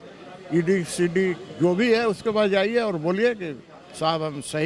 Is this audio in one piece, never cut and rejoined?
yes; 0 cuts

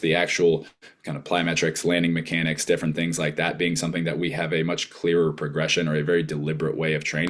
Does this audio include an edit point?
no; 0 cuts

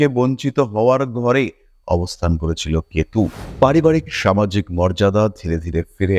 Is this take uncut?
no; 1 cut; at 3.4 s

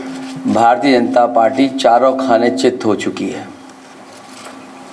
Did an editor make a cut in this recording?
no; 0 cuts

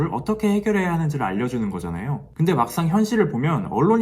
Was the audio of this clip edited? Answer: yes; 1 cut; at 2.2 s

